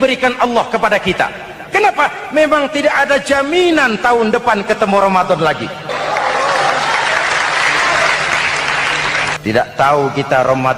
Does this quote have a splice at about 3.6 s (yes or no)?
no